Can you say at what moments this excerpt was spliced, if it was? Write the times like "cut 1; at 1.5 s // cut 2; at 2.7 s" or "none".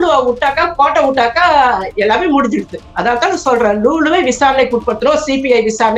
none